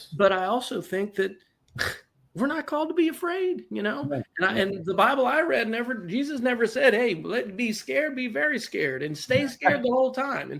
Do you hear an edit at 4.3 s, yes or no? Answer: no